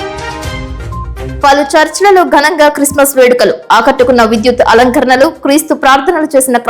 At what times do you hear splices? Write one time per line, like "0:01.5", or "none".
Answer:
0:01.1